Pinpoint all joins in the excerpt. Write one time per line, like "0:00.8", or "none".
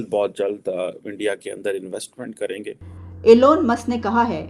0:03.1

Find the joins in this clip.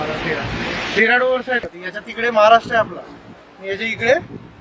0:01.7

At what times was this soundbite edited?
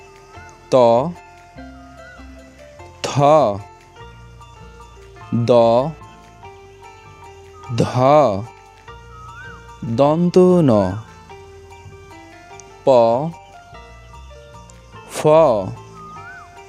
none

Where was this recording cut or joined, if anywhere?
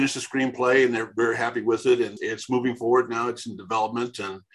none

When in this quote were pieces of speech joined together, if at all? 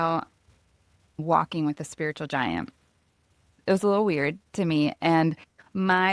0:01.2
0:03.4

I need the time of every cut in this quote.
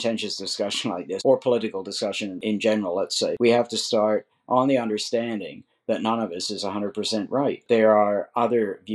0:01.1
0:02.4
0:03.4
0:07.6

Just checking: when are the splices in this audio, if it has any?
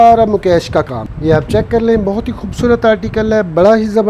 0:01.0

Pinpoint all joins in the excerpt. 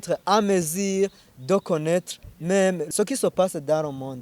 0:01.3
0:02.8

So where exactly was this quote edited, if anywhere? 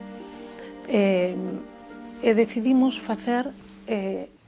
none

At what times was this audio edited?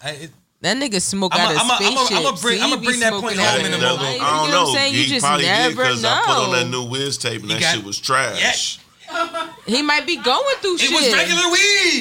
0:04.1

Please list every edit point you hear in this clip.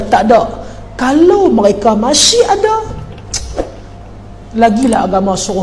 none

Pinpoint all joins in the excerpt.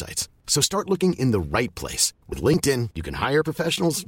none

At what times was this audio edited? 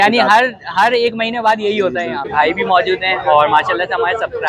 0:02.3

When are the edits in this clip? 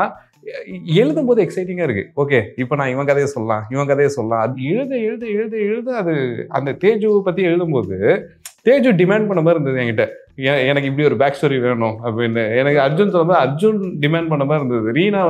0:04.5

